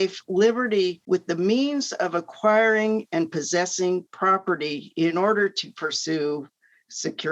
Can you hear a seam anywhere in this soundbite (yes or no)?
yes